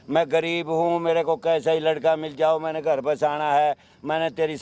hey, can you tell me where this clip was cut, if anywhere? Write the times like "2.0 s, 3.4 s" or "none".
none